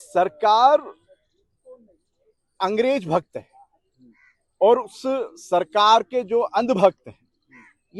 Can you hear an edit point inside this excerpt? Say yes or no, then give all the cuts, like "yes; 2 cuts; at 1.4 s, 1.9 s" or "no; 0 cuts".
no; 0 cuts